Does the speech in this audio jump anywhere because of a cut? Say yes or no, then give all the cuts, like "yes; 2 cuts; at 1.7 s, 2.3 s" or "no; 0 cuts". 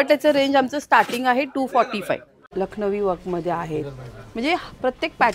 yes; 1 cut; at 2.4 s